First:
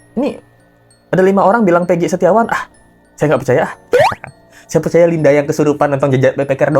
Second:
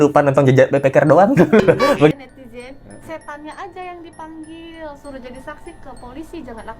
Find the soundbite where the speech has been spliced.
second; 1 cut; at 2.1 s

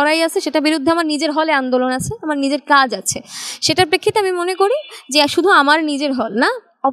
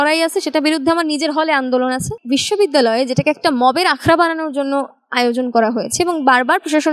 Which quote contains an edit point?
second; 1 cut; at 2.2 s

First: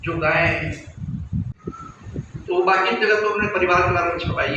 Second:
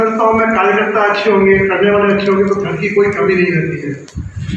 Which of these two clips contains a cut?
first; 1 cut; at 1.5 s

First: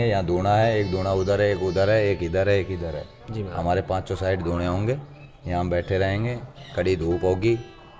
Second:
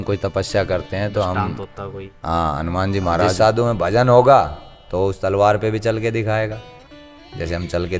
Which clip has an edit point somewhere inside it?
second; 1 cut; at 3.4 s

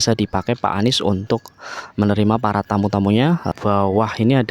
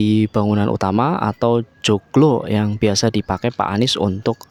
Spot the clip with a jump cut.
first; 1 cut; at 3.5 s

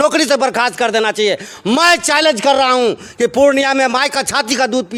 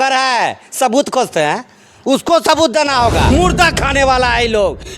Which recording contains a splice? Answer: second; 1 cut; at 3.3 s

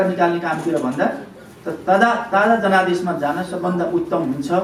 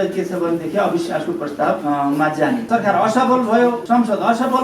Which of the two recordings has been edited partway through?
second; 3 cuts; at 1.8 s, 2.6 s, 3.8 s

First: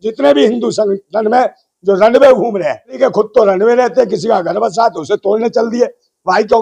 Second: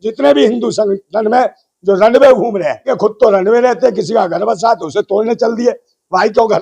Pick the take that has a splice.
second; 1 cut; at 2.8 s

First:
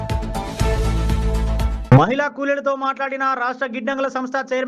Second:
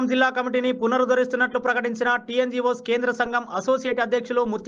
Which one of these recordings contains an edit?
first; 1 cut; at 1.8 s

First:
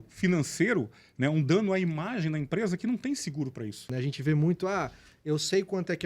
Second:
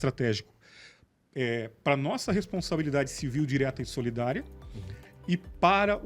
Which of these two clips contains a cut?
first; 1 cut; at 3.9 s

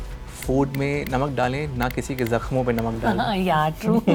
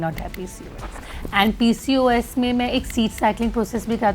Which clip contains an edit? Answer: second; 1 cut; at 1.1 s

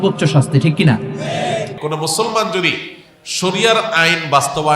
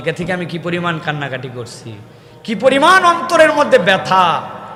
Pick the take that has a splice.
first; 1 cut; at 1.8 s

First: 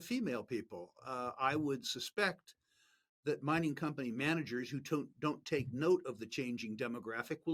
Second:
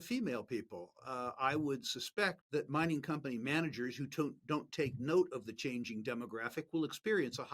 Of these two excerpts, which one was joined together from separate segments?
second; 1 cut; at 2.4 s

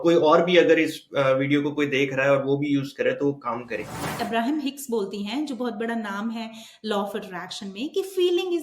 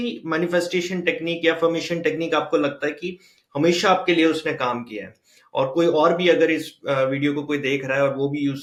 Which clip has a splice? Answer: first; 1 cut; at 4.0 s

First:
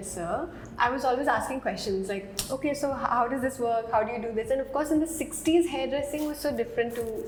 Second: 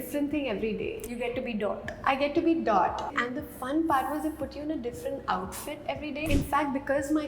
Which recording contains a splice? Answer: second; 1 cut; at 6.2 s

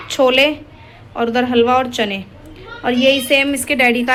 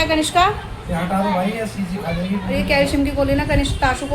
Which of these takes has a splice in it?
second; 1 cut; at 2.6 s

